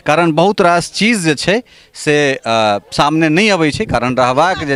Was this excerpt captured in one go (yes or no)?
yes